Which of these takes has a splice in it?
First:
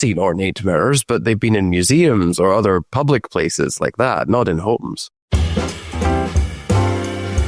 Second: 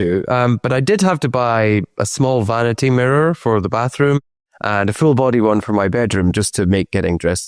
first; 1 cut; at 5.3 s

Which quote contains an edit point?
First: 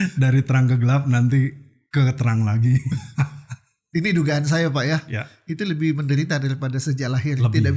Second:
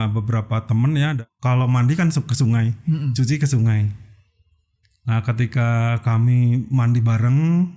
second; 1 cut; at 1.2 s

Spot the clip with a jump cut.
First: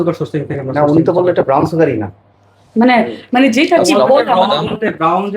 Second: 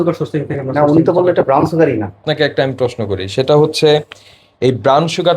second; 1 cut; at 2.2 s

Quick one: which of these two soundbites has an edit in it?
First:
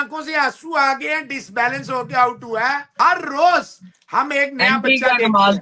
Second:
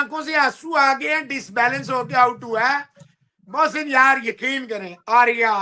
first; 1 cut; at 2.9 s

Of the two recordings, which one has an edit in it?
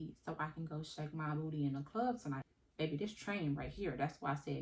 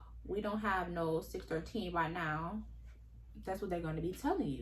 first; 1 cut; at 2.4 s

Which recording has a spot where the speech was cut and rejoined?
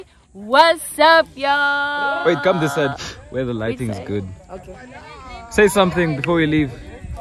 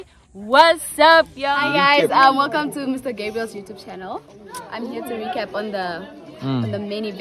second; 1 cut; at 1.6 s

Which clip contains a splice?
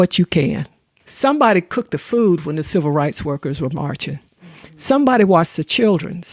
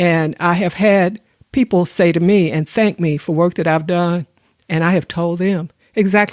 first; 1 cut; at 1.0 s

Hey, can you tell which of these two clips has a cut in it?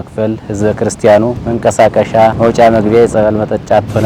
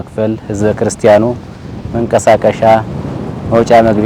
first; 2 cuts; at 1.4 s, 2.4 s

